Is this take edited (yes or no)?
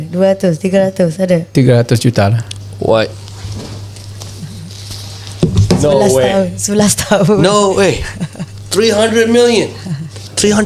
no